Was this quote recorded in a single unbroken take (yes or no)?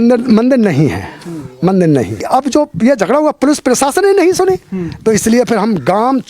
no